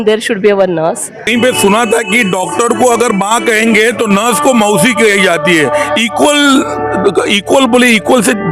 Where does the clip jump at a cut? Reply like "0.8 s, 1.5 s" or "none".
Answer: 1.2 s